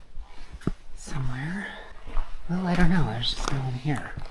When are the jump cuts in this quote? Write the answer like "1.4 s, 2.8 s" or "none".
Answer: 1.9 s